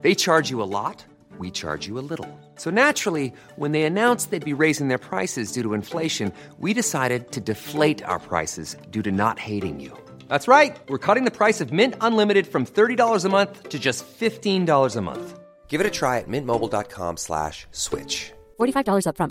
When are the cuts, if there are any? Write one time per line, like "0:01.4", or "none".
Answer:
none